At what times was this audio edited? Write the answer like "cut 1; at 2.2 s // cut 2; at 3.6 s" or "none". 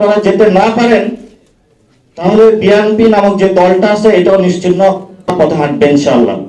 cut 1; at 5.3 s